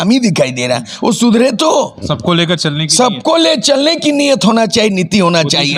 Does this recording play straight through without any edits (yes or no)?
yes